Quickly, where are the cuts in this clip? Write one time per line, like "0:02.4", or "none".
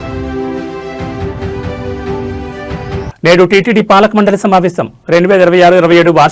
0:02.9